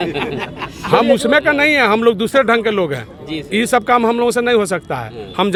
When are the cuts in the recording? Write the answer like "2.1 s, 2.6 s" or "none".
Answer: none